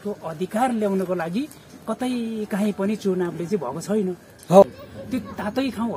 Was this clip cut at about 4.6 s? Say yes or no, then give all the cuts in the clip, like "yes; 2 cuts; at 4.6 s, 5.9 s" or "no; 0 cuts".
yes; 1 cut; at 4.6 s